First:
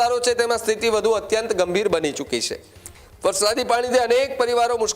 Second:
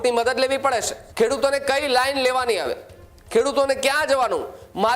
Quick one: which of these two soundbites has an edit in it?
second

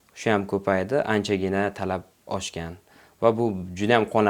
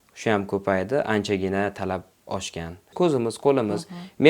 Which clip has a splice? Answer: second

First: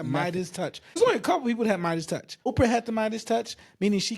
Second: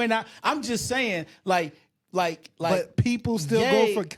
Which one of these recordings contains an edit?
first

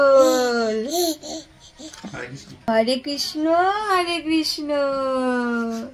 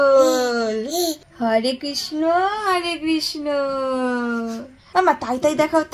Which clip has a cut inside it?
second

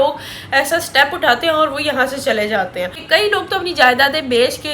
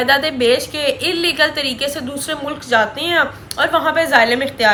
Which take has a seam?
first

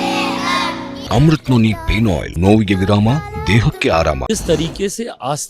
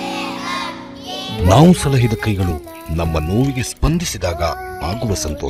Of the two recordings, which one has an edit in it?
first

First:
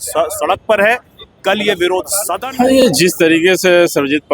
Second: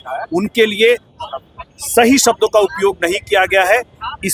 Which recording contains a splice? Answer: first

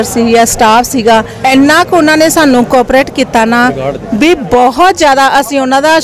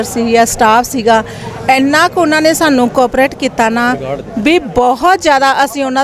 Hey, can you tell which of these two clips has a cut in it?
first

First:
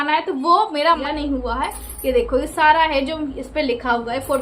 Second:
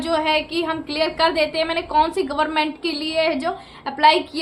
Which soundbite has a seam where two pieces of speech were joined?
first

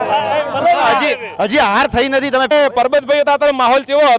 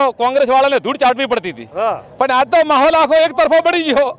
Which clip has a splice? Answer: first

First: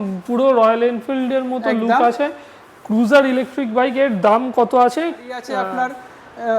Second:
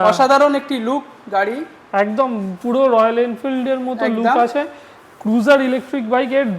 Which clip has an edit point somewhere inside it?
first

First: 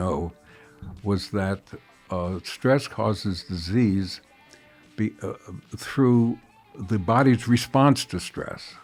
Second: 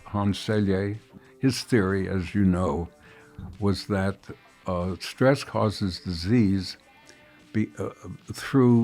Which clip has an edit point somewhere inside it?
second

